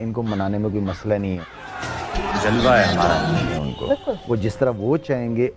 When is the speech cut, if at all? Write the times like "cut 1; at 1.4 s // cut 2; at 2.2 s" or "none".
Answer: cut 1; at 1.5 s // cut 2; at 3.3 s